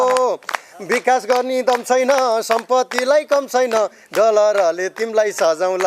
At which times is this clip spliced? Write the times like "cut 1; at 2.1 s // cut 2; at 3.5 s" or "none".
none